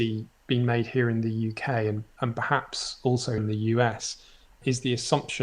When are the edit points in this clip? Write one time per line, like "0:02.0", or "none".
0:03.4